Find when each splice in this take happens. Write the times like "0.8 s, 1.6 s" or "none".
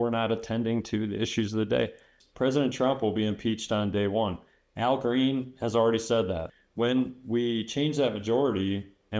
2.2 s, 6.5 s